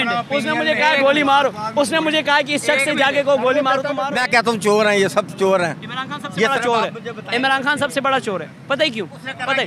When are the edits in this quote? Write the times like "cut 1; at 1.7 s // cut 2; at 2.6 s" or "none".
cut 1; at 4.0 s